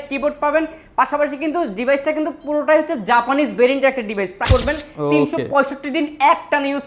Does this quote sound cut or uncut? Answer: cut